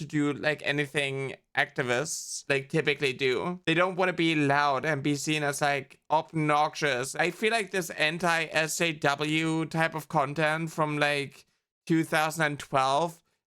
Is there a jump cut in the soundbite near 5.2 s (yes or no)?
no